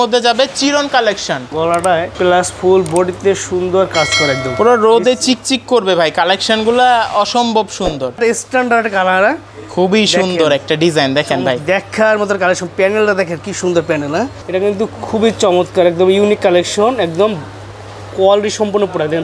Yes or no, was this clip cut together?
yes